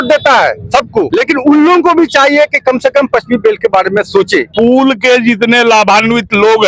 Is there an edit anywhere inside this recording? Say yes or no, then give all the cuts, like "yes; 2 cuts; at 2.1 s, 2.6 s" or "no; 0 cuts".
yes; 2 cuts; at 1.1 s, 4.5 s